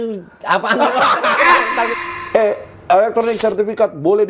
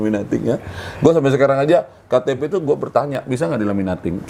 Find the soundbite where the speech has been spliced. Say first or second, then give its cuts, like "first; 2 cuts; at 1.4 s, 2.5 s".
first; 1 cut; at 1.9 s